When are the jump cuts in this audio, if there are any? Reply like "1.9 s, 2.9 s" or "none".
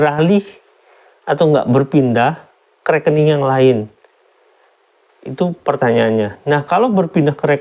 none